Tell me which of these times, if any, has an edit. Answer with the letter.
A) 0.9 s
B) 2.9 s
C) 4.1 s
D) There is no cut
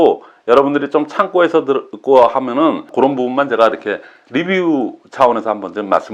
B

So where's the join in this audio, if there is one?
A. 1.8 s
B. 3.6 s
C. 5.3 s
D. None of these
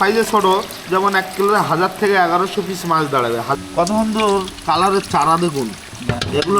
B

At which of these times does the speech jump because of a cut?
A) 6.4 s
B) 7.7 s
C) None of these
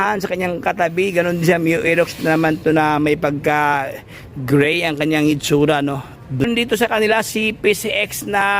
A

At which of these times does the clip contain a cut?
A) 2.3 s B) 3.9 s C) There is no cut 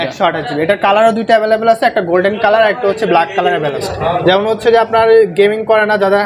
B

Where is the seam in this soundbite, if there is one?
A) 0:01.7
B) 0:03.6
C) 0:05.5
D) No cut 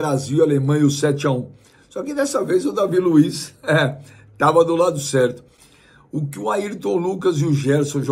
D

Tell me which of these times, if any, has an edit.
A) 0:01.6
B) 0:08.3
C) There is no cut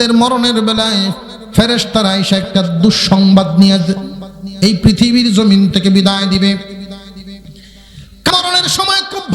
B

